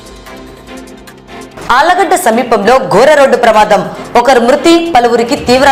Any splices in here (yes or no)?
no